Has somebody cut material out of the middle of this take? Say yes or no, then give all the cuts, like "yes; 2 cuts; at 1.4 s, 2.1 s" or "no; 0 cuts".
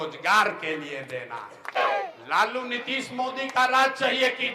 yes; 1 cut; at 1.8 s